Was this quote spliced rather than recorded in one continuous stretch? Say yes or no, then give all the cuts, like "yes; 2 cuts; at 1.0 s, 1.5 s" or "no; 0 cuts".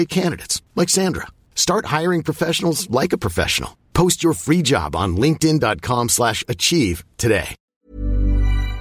yes; 1 cut; at 7.6 s